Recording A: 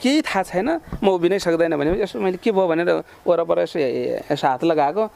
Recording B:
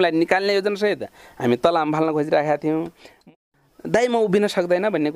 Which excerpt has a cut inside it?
B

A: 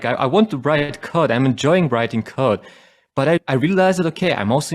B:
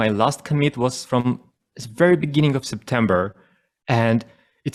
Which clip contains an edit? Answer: A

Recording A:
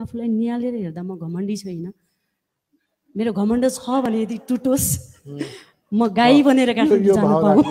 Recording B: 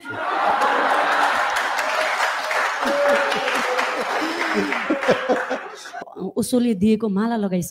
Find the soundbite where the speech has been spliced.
B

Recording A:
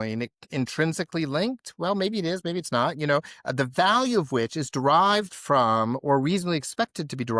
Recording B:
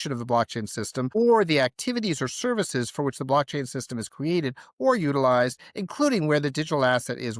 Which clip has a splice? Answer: B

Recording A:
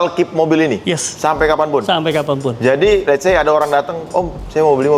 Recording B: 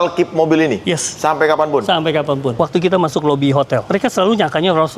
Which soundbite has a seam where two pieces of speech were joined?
B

